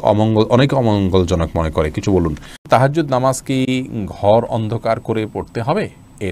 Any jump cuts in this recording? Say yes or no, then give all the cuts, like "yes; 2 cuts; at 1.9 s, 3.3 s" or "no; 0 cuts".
yes; 1 cut; at 2.6 s